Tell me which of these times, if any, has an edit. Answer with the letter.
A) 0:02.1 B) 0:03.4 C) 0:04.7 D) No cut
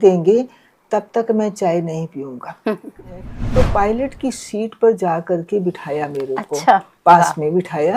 B